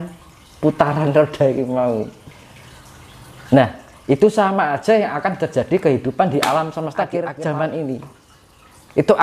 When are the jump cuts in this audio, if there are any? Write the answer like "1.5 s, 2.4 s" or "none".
7.2 s